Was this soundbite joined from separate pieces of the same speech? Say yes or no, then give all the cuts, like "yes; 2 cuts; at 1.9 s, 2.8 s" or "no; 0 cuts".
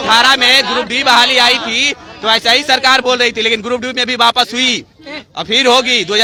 no; 0 cuts